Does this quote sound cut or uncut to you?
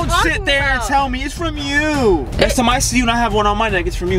uncut